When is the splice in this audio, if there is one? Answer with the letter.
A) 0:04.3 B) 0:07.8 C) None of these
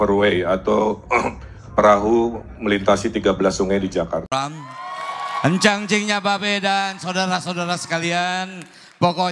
A